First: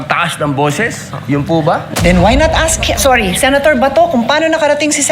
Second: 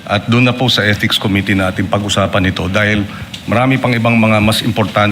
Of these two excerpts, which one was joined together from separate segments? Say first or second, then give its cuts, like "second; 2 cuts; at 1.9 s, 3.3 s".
first; 1 cut; at 1.8 s